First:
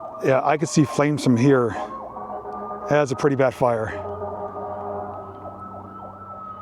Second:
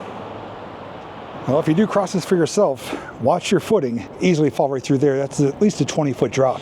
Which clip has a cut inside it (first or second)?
second